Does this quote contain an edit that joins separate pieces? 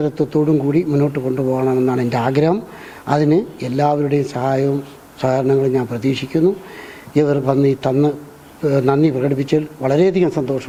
no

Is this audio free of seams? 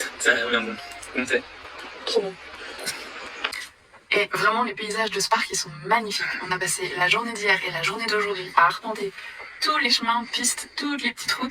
no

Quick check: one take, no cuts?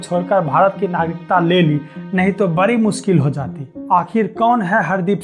yes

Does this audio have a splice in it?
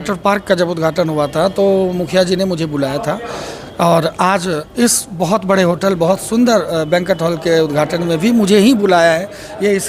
no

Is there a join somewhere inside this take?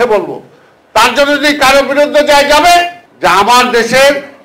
yes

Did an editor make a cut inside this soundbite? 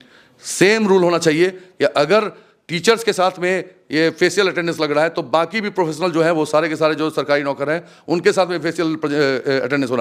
no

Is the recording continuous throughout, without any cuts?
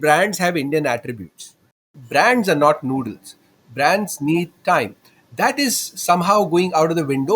no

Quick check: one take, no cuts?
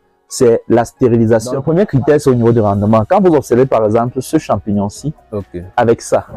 no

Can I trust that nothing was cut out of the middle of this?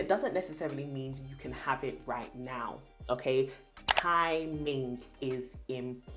yes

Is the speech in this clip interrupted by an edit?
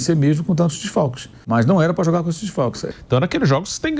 yes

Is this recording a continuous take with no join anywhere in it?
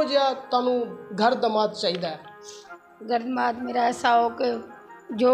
yes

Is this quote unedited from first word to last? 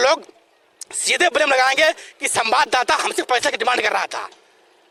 yes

